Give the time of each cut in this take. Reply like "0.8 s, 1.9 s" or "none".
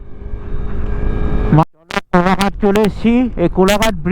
1.6 s

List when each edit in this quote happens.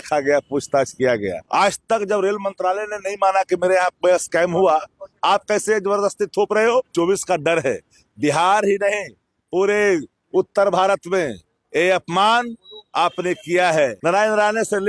1.4 s, 6.9 s, 14.0 s

